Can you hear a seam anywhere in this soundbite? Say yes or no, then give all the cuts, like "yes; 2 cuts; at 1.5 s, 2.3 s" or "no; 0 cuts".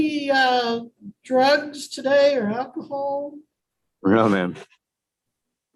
no; 0 cuts